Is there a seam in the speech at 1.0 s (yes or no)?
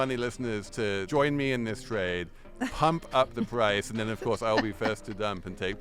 yes